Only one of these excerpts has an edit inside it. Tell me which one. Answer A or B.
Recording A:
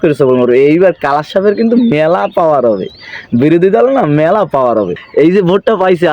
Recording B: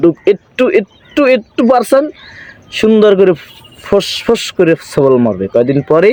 A